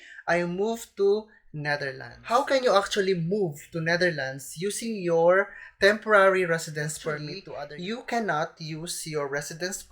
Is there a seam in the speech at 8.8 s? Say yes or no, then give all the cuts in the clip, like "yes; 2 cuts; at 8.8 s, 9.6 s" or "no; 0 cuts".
no; 2 cuts; at 2.2 s, 7.4 s